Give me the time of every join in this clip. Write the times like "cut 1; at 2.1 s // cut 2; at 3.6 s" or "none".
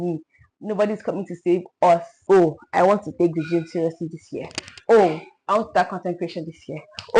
cut 1; at 2.1 s